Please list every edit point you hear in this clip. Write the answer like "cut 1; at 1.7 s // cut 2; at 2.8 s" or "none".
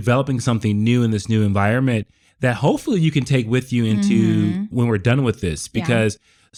none